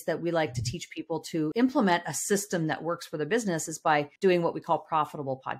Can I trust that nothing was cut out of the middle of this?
no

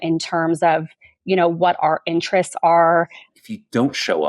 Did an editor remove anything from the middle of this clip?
yes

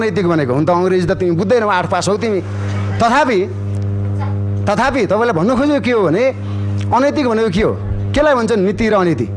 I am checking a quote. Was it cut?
no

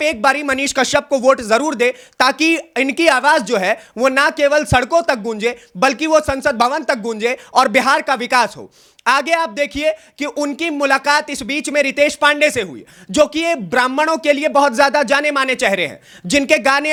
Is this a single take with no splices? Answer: yes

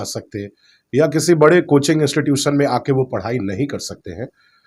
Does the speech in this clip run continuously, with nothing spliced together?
yes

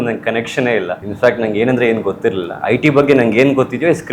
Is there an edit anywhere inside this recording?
yes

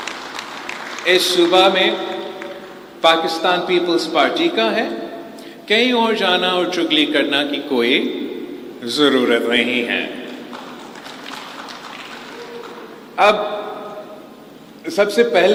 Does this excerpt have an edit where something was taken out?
no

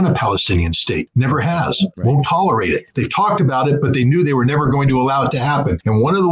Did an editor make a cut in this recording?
no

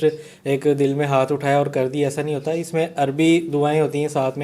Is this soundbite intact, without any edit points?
yes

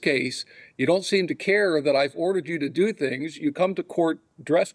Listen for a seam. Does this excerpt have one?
no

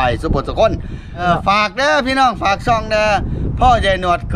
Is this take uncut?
no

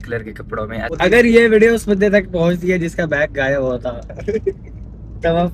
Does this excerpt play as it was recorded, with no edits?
no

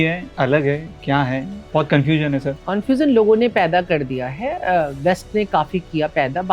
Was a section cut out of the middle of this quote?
yes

